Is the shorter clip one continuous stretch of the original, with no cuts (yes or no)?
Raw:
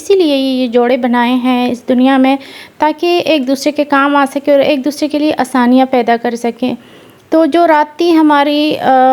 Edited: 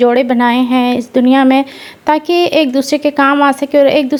yes